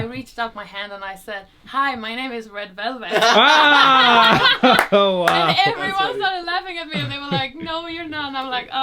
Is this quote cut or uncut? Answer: uncut